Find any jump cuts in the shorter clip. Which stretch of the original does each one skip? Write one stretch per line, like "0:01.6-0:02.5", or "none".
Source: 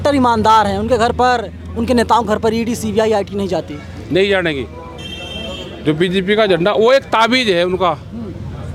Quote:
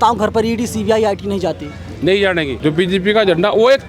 0:04.6-0:05.8